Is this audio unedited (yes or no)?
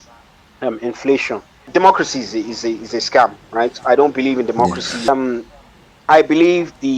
no